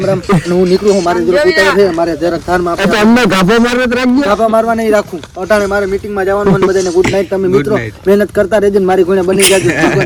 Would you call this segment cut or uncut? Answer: uncut